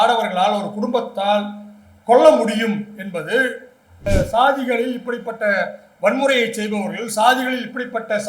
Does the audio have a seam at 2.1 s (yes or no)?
no